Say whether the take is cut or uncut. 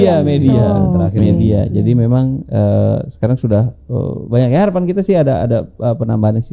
uncut